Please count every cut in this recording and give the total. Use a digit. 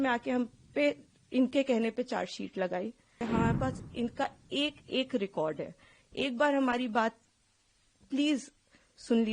1